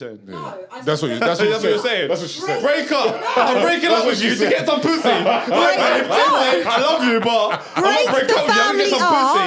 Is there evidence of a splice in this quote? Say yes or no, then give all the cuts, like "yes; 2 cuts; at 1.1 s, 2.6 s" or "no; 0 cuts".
no; 0 cuts